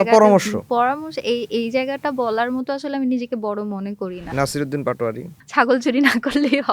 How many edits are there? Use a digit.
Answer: 2